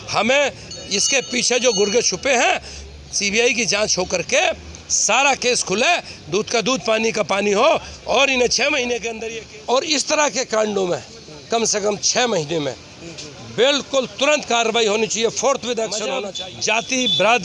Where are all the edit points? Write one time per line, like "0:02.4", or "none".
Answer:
0:09.1
0:16.3